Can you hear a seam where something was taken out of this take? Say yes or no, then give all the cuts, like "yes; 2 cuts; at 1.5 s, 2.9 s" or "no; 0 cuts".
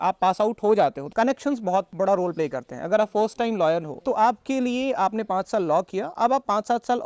yes; 2 cuts; at 1.9 s, 3.9 s